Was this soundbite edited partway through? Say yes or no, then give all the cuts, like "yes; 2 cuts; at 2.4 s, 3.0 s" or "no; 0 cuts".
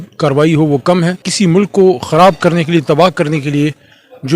yes; 1 cut; at 1.2 s